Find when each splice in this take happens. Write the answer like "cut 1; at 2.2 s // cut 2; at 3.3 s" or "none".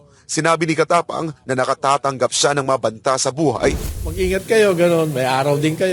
cut 1; at 3.9 s